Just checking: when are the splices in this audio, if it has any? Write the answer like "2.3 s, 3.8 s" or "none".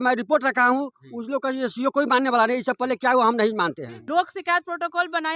3.9 s